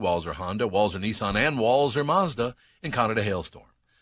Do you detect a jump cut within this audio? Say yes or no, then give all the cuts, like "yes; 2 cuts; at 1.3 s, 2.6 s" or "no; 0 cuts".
no; 0 cuts